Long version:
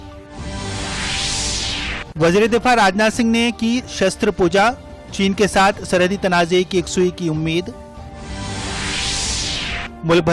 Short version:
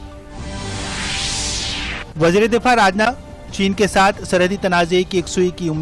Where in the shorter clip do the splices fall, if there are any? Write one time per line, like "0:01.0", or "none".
0:03.1

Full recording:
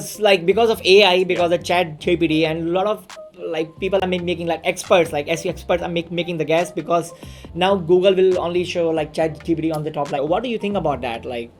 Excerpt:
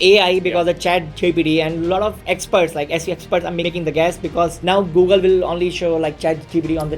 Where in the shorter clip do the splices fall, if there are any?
0:02.2
0:03.7
0:04.6

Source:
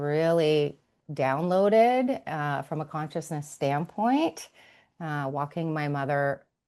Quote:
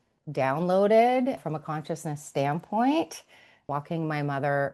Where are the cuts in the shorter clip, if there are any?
0:01.4
0:03.7

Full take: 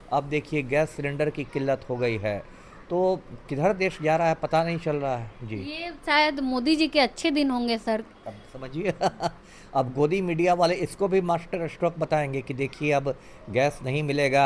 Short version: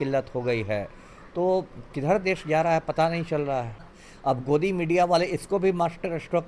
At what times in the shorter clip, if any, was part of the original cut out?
0:04.0

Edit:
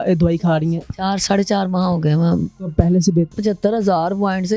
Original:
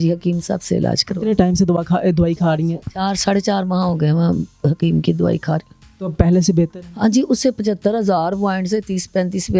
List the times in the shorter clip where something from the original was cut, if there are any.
0:02.5
0:03.4

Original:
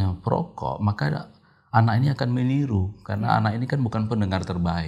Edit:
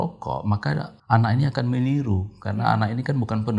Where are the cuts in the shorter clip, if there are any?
0:00.9

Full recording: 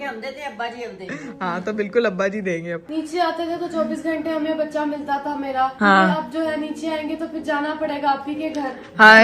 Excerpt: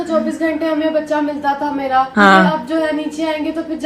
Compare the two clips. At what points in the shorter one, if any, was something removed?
none

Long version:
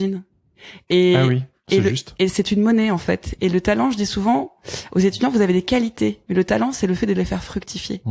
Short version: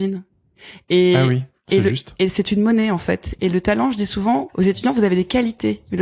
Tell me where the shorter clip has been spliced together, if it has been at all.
0:04.5

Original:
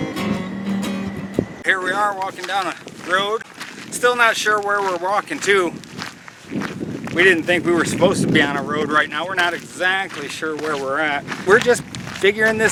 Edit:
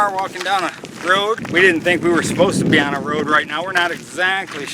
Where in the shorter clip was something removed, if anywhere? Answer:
0:01.4

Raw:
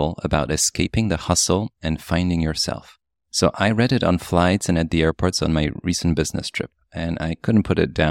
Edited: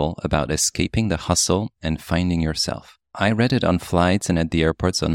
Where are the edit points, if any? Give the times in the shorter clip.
0:03.2

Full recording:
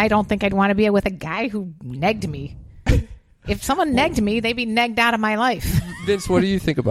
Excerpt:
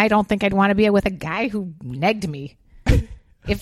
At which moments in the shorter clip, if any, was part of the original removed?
none

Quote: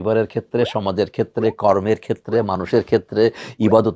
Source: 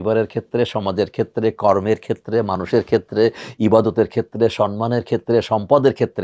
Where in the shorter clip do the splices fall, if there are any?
none

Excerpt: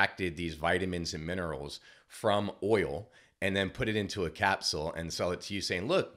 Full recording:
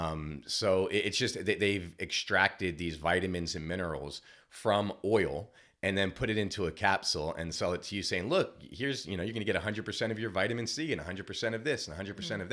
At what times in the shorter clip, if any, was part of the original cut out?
none

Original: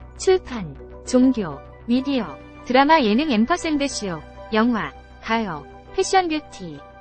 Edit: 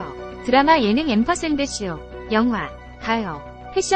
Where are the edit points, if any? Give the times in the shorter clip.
none

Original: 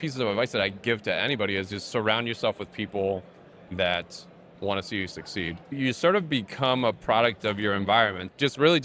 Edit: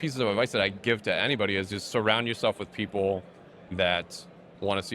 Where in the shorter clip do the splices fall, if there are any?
none

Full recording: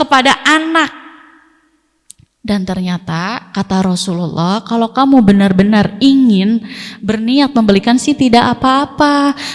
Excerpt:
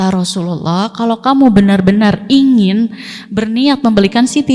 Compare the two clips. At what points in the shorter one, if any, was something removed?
none

